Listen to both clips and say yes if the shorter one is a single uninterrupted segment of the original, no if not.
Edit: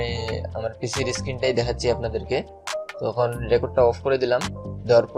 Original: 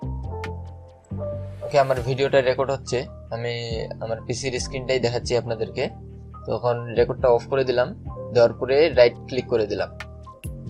yes